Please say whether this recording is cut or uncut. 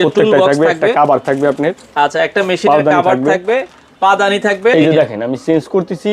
cut